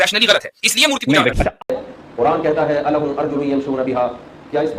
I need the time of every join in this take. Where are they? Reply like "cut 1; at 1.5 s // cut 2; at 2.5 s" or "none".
cut 1; at 1.6 s